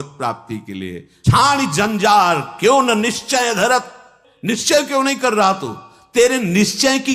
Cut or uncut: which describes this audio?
cut